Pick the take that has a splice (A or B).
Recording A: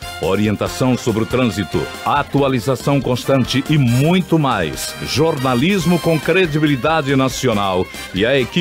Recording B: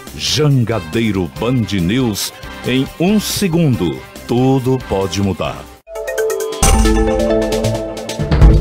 B